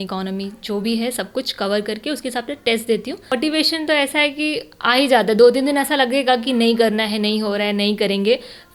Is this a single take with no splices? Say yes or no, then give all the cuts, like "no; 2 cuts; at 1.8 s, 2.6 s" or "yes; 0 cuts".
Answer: no; 1 cut; at 3.3 s